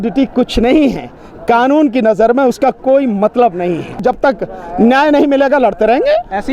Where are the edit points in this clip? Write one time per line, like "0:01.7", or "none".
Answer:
0:04.0